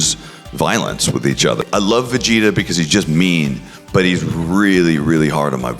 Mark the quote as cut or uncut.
cut